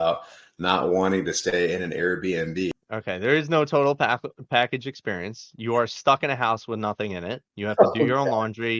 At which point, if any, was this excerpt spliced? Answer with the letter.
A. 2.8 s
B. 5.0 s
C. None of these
A